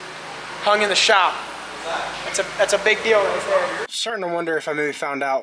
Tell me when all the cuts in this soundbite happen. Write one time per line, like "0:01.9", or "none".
0:03.9